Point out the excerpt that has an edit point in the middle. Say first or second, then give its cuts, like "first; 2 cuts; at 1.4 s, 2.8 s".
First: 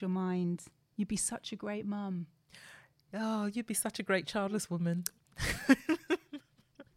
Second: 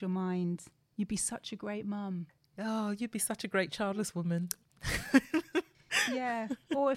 second; 2 cuts; at 2.4 s, 5.8 s